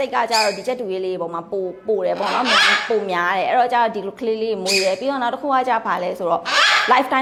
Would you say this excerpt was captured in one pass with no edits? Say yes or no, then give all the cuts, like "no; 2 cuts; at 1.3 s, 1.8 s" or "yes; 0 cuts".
yes; 0 cuts